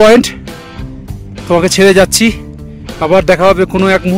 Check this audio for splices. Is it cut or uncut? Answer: uncut